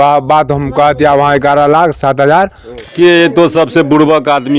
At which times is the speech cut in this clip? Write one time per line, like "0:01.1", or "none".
0:02.9